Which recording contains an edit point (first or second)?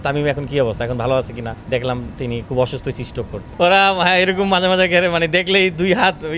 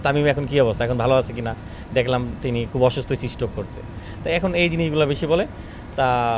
first